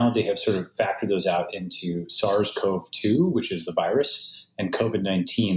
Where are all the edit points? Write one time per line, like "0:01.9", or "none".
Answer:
none